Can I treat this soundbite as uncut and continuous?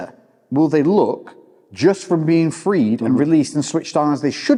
yes; 0 cuts

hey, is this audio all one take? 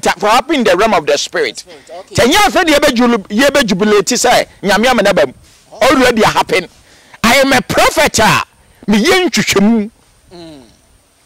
yes; 0 cuts

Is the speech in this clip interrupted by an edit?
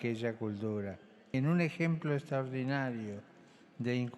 yes; 1 cut; at 1.3 s

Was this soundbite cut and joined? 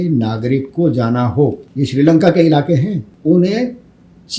yes; 2 cuts; at 1.6 s, 3.1 s

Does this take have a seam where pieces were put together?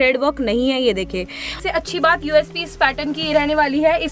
yes; 1 cut; at 1.6 s

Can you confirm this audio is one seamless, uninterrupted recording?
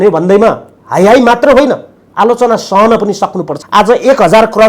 no; 1 cut; at 3.5 s

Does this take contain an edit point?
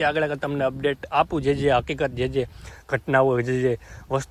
no; 0 cuts

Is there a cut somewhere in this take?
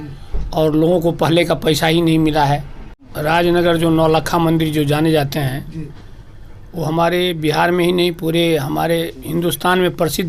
yes; 1 cut; at 3.1 s

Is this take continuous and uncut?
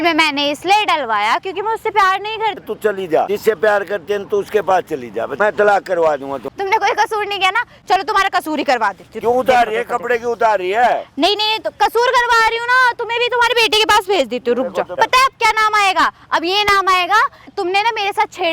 no; 6 cuts; at 2.9 s, 5.3 s, 6.4 s, 9.1 s, 15.0 s, 17.5 s

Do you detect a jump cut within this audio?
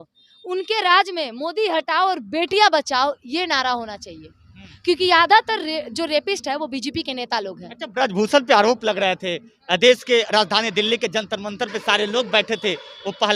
no; 0 cuts

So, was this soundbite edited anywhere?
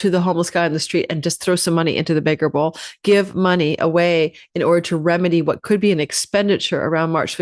no; 0 cuts

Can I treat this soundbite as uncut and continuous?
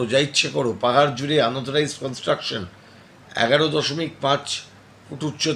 yes; 0 cuts

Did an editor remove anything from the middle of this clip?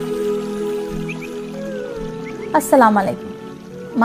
yes; 1 cut; at 2.3 s

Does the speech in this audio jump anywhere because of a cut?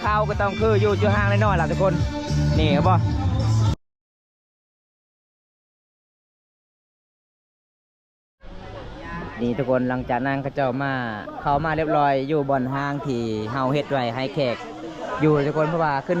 no; 0 cuts

